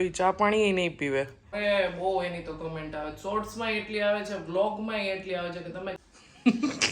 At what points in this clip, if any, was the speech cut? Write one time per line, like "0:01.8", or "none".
0:01.4
0:05.9